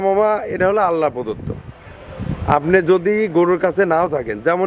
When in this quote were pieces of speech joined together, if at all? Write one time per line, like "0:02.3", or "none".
none